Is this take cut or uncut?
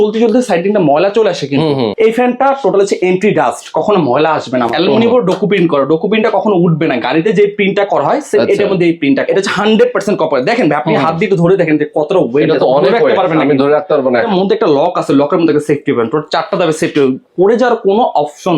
cut